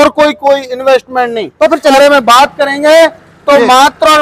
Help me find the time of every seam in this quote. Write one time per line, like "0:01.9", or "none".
0:01.9